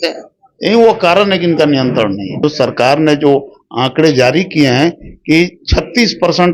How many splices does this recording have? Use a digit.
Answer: 1